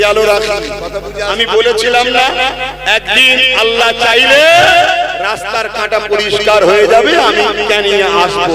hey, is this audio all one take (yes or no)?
no